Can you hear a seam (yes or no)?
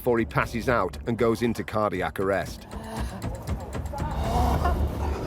no